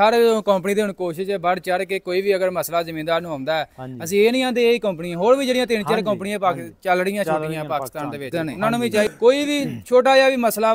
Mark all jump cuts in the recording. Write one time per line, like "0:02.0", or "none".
0:09.1